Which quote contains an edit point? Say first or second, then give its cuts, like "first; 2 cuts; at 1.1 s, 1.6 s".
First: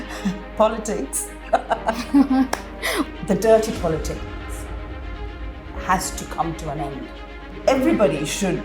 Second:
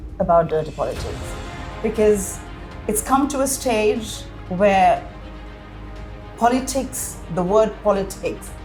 first; 2 cuts; at 3.1 s, 7.4 s